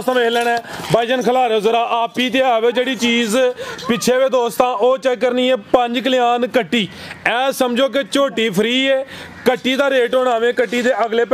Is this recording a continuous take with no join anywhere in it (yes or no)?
yes